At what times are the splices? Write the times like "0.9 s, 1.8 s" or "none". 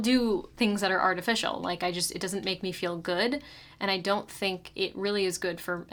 none